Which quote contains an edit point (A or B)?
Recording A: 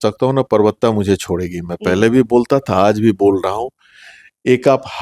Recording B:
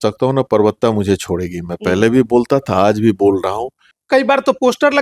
B